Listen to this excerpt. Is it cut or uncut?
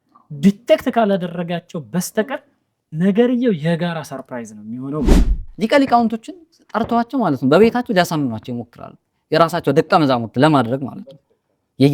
cut